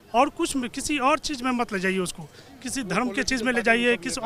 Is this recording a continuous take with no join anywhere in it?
yes; 0 cuts

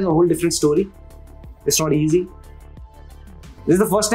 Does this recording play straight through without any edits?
yes; 0 cuts

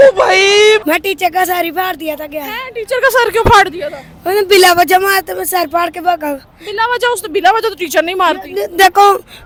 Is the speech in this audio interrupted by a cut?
no; 0 cuts

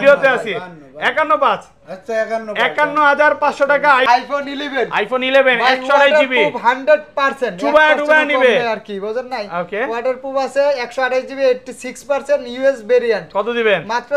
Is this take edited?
yes; 1 cut; at 4.1 s

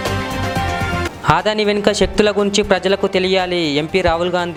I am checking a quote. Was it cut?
no; 0 cuts

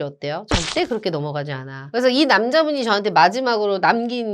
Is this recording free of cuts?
no; 1 cut; at 1.7 s

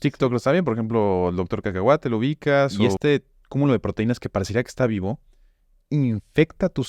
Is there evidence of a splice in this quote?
yes; 1 cut; at 2.8 s

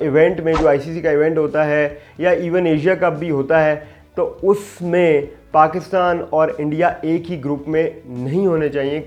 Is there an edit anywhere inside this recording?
no; 0 cuts

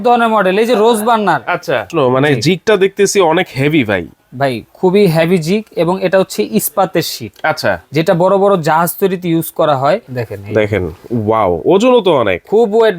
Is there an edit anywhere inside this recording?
yes; 2 cuts; at 1.9 s, 10.2 s

